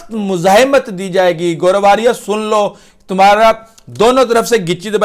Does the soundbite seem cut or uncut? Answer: uncut